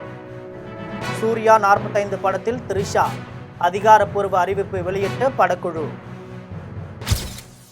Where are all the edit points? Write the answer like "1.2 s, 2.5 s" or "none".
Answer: none